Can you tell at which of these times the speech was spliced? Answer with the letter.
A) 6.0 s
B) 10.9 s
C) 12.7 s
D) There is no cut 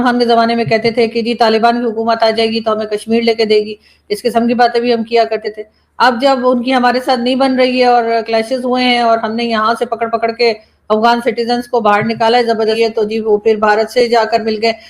C